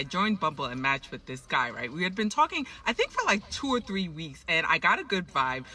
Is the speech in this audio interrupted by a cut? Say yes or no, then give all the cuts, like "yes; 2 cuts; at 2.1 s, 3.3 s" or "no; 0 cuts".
yes; 1 cut; at 4.7 s